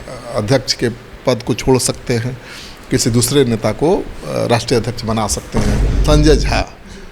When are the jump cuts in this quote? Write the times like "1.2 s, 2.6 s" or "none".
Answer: 5.9 s